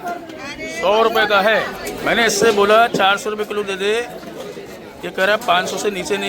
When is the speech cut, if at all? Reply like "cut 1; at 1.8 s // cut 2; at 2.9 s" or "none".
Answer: cut 1; at 1.9 s